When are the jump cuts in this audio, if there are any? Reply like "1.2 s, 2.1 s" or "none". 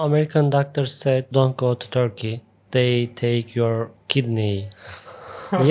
1.3 s, 2.6 s